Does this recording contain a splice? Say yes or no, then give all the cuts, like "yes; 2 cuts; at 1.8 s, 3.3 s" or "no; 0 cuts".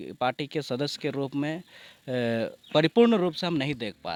no; 0 cuts